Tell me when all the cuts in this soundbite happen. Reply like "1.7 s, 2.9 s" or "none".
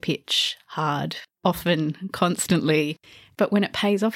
1.4 s, 3.0 s